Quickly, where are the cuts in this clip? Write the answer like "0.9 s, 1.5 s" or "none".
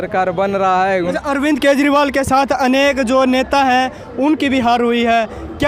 1.1 s